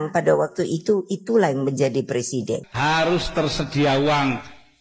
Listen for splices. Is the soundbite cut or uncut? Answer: cut